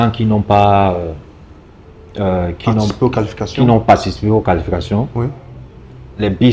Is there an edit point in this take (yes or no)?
no